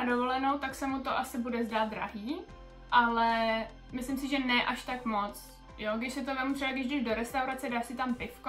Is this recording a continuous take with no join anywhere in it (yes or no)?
yes